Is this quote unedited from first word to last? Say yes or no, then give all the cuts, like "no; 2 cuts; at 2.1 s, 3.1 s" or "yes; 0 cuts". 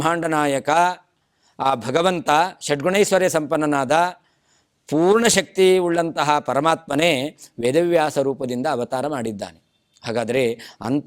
yes; 0 cuts